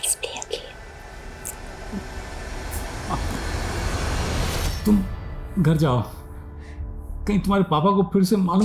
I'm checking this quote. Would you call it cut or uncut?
cut